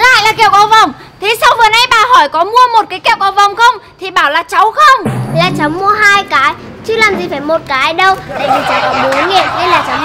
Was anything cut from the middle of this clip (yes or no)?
no